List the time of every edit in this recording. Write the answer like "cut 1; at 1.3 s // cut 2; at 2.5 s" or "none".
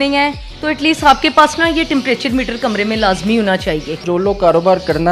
cut 1; at 4.0 s